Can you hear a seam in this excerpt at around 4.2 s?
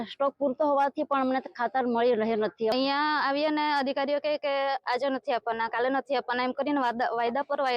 no; 1 cut; at 2.7 s

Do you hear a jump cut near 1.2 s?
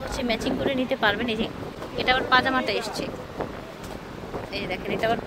no; 0 cuts

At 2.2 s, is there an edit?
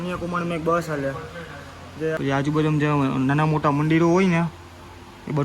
yes; 1 cut; at 2.2 s

